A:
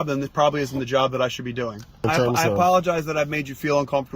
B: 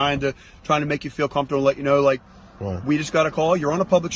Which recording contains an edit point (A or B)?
A